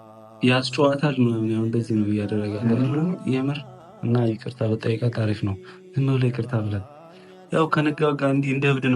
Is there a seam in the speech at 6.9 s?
no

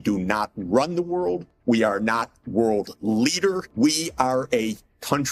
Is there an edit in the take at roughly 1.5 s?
yes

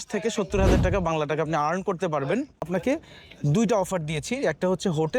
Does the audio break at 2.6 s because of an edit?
yes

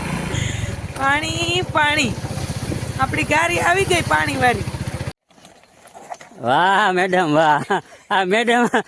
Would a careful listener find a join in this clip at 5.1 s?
yes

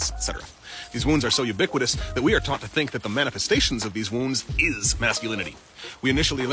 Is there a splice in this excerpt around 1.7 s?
no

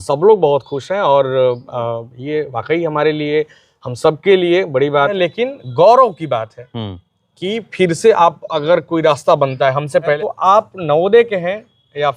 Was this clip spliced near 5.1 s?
yes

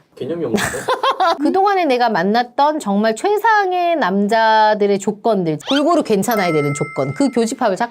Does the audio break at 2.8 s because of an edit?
no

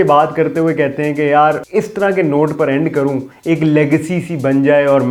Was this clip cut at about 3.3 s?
no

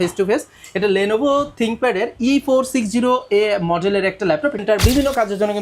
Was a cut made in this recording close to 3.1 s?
no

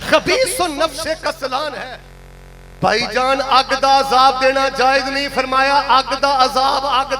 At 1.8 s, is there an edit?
yes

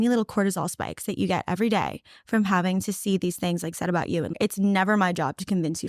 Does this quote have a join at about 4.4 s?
yes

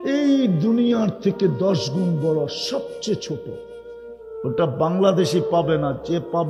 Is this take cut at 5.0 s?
no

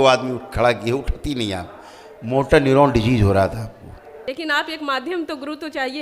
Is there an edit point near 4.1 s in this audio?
yes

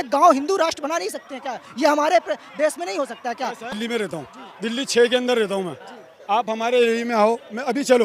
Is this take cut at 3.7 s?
yes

